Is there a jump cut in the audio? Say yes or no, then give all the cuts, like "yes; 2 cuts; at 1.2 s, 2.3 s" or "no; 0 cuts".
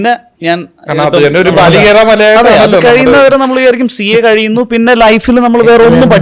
no; 0 cuts